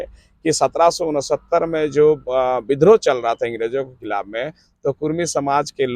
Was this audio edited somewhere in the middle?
no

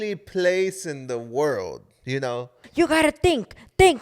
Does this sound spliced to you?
yes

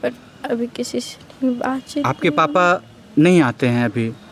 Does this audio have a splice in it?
no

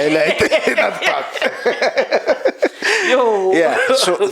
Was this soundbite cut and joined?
no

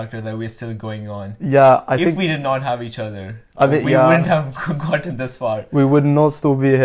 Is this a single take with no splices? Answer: yes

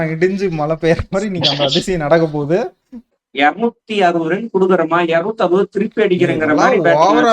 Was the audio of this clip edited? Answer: yes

